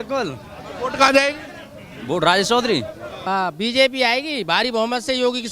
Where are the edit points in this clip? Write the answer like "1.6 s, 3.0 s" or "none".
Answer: 3.1 s

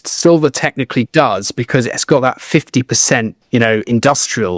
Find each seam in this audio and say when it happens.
3.4 s

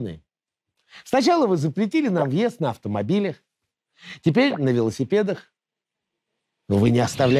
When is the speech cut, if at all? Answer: none

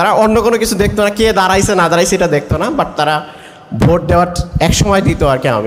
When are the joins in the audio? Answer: none

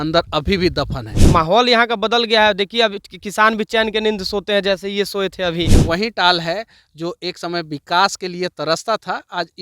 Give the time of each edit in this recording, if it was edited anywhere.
1.1 s, 5.8 s

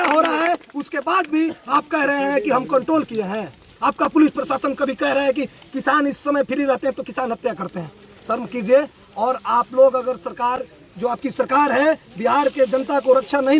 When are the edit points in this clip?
none

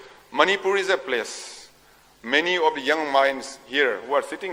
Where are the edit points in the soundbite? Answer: none

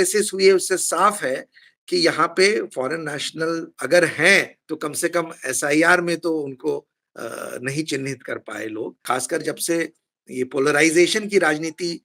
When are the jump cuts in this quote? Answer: 9.0 s

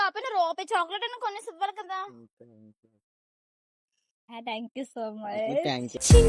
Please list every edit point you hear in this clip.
none

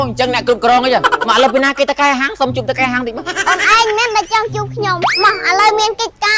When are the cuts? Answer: 1.2 s, 3.1 s, 5.0 s

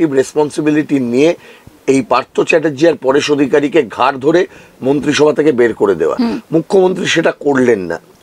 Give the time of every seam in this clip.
none

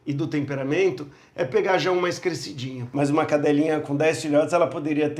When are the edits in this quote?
2.8 s

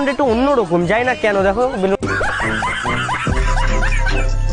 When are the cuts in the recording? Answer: none

